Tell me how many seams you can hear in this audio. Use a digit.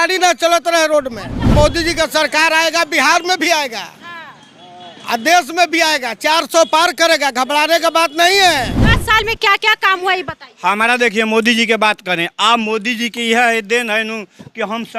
2